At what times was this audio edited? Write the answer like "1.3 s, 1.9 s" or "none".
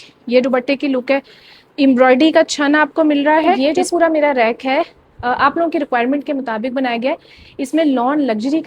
3.6 s